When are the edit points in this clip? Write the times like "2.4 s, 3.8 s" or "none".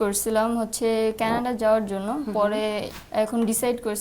2.9 s

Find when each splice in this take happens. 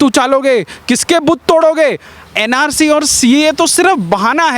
2.3 s

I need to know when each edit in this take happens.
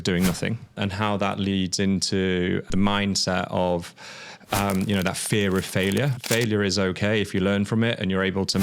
0.8 s, 2.7 s, 6.2 s

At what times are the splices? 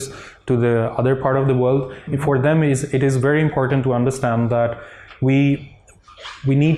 none

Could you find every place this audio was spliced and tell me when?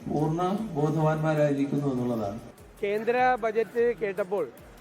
2.4 s

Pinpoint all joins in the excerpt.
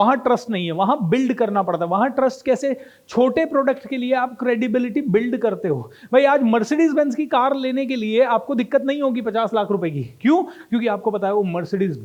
none

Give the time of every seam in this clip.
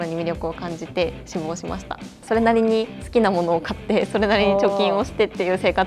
2.0 s

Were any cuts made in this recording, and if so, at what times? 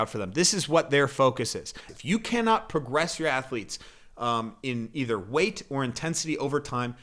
1.9 s

